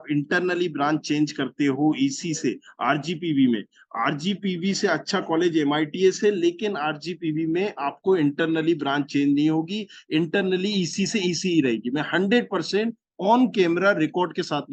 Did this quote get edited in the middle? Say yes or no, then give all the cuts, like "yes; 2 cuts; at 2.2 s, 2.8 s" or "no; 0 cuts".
no; 0 cuts